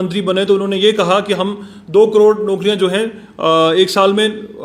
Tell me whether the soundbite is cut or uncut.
uncut